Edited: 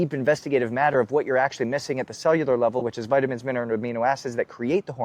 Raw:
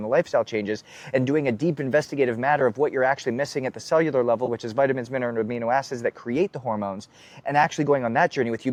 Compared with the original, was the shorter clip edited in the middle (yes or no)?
no